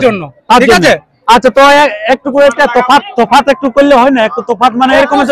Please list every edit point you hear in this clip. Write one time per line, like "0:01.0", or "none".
none